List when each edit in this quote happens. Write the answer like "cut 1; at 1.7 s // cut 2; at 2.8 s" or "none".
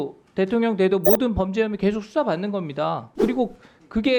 cut 1; at 3.1 s